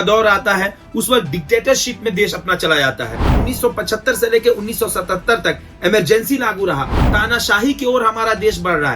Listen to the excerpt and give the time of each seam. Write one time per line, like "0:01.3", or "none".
0:03.3
0:07.0